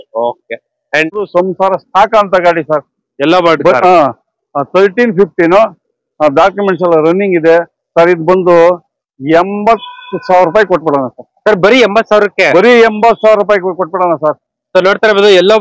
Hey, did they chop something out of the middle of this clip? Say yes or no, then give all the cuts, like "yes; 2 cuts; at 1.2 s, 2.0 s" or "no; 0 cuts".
yes; 1 cut; at 1.1 s